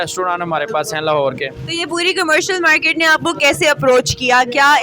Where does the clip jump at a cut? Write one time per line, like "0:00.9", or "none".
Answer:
none